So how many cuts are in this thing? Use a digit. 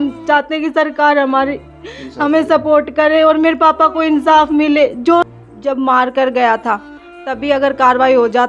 1